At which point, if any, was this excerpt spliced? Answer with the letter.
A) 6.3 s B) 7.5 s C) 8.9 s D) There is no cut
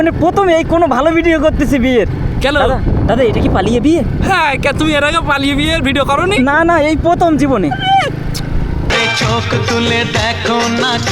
C